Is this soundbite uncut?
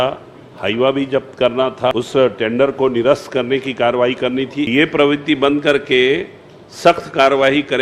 no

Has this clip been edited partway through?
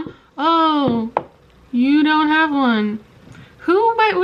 no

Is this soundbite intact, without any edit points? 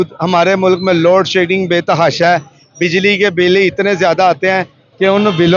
yes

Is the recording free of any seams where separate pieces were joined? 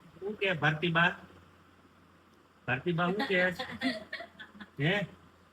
yes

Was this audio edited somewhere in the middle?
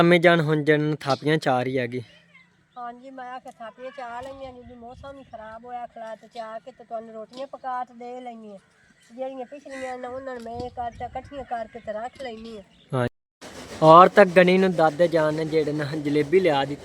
yes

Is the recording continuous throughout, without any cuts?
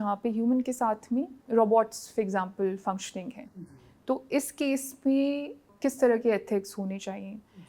no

